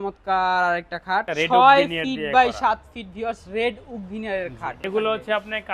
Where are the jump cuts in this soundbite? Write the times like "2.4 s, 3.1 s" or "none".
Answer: 1.3 s, 4.8 s